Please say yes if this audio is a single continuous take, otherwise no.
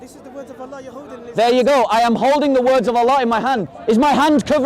no